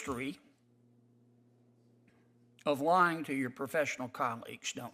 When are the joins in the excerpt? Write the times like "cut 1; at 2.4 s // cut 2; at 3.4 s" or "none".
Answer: none